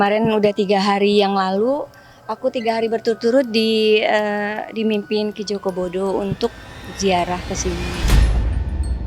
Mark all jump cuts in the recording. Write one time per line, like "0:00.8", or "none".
0:08.0